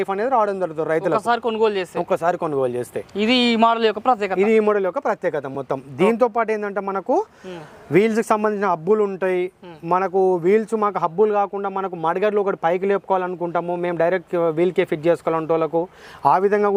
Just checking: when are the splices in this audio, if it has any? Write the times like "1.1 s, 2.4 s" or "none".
none